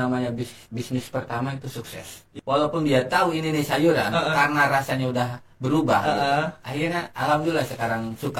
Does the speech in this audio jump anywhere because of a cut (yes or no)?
yes